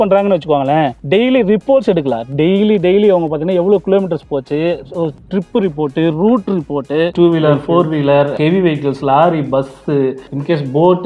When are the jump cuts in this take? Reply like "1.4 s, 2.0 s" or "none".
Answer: 7.1 s, 8.3 s